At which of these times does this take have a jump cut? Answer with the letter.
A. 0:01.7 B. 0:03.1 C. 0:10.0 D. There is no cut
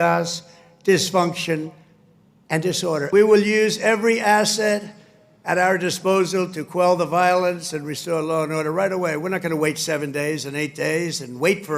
B